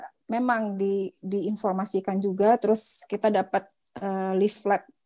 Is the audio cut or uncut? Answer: uncut